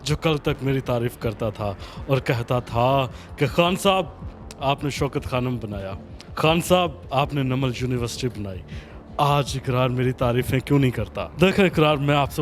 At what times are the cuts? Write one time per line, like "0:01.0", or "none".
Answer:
0:11.2